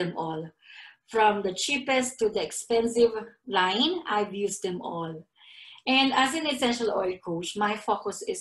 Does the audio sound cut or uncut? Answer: uncut